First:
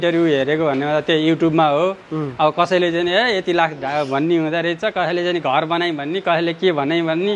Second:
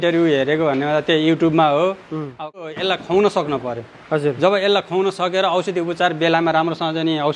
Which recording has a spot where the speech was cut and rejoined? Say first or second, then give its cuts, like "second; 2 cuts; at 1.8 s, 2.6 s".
second; 1 cut; at 2.6 s